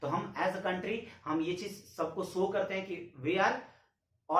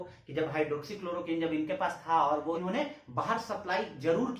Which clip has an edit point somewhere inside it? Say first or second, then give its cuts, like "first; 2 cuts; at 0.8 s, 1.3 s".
second; 1 cut; at 2.6 s